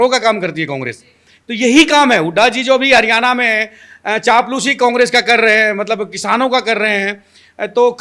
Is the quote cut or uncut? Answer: uncut